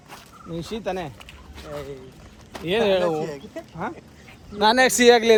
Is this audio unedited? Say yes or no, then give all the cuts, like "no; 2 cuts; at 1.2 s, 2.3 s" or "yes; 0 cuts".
yes; 0 cuts